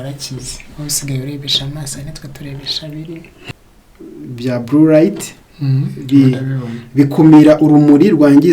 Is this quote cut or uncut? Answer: cut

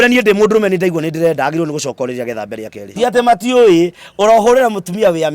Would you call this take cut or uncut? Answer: cut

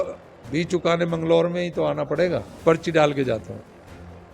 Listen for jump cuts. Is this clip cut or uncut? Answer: cut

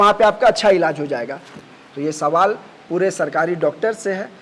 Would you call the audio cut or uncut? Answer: cut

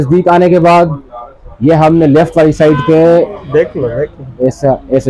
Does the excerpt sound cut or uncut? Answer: uncut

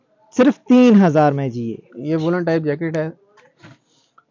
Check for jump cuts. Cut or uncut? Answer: uncut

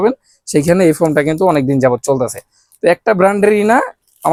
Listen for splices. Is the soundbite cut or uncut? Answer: uncut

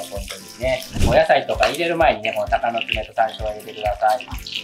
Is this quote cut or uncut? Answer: cut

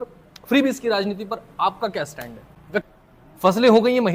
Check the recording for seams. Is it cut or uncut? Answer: cut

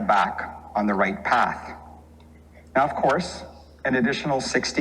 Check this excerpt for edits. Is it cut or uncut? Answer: uncut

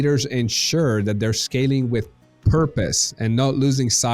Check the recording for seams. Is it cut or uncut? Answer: uncut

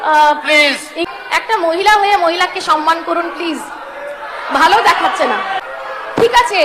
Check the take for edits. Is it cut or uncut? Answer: cut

